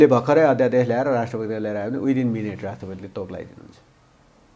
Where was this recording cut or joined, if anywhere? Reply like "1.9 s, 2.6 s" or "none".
none